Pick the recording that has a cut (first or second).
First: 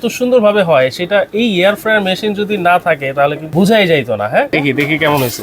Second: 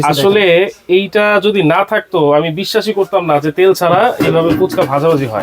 first